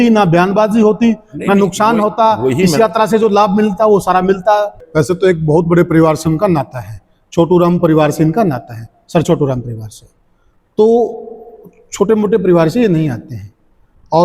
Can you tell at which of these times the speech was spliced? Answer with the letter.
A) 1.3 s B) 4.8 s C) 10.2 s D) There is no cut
B